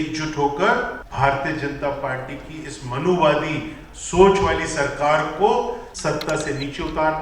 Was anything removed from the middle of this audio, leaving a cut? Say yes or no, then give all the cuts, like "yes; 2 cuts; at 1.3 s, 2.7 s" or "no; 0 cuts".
yes; 2 cuts; at 1.0 s, 5.9 s